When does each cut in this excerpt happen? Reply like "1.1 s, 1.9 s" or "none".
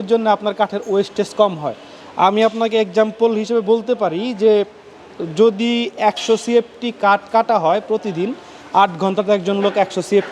none